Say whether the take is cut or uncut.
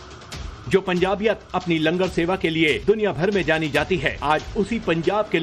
uncut